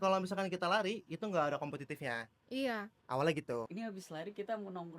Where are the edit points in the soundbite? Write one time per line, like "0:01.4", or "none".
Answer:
0:03.7